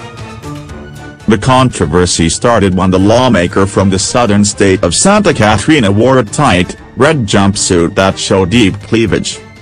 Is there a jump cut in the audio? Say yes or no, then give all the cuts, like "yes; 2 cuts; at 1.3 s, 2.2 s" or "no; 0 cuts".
yes; 1 cut; at 1.2 s